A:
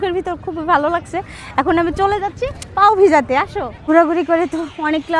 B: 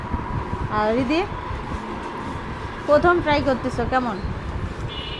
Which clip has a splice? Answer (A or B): A